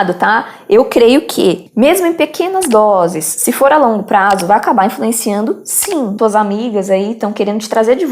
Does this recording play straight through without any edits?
no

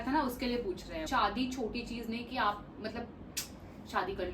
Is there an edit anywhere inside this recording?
yes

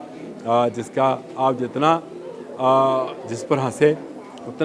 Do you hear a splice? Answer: no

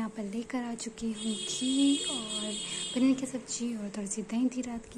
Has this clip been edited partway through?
no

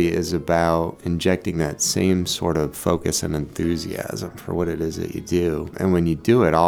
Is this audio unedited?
no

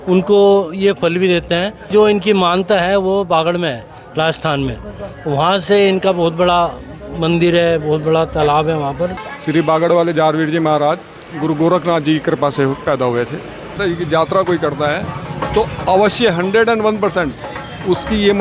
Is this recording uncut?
no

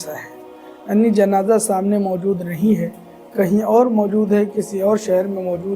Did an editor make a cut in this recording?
no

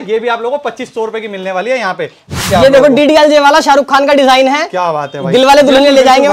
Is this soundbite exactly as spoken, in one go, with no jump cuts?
no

